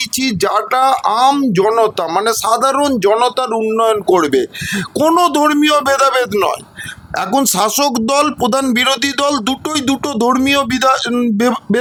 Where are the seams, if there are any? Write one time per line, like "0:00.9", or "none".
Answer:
none